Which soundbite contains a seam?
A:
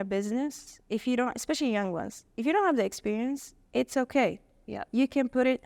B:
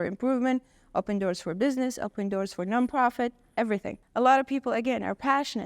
B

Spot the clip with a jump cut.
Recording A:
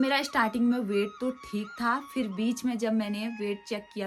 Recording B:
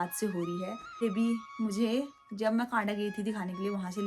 B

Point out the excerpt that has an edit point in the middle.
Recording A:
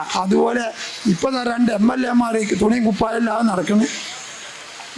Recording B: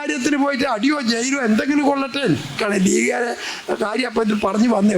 B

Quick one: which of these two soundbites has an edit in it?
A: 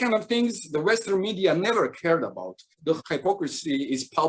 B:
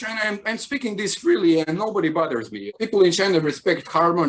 A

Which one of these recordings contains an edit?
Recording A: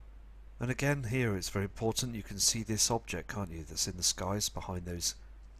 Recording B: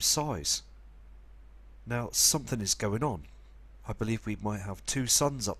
A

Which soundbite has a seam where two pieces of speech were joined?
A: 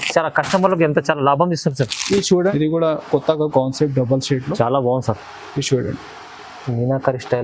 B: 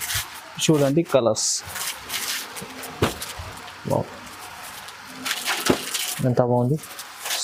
A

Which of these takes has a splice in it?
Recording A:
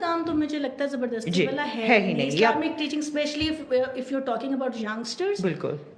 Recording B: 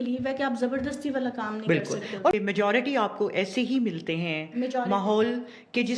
B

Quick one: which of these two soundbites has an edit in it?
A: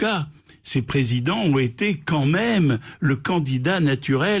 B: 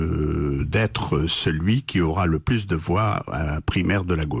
B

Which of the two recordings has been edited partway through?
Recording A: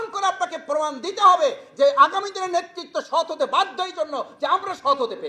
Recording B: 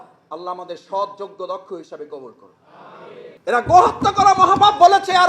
B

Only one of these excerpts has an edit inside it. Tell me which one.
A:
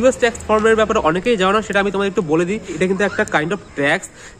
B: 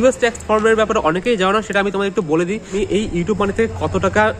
B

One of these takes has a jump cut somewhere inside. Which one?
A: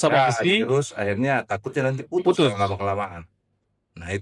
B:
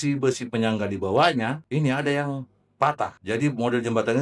B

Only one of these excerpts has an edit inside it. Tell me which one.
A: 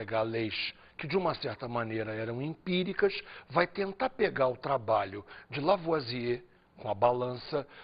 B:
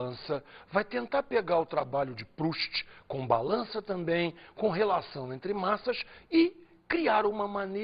A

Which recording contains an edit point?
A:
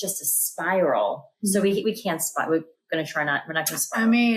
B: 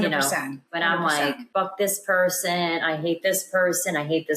B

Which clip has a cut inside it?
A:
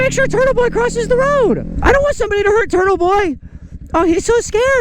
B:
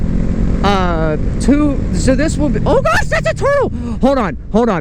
A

